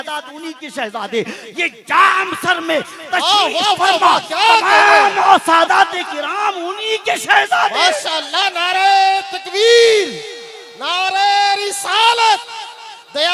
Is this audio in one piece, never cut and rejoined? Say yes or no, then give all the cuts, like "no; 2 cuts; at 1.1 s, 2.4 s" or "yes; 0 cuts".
yes; 0 cuts